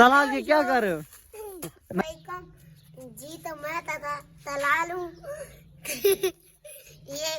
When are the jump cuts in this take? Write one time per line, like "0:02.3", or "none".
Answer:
0:02.0